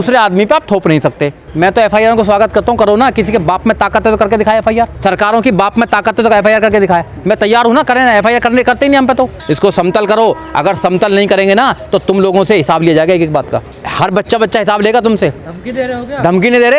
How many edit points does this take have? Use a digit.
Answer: 4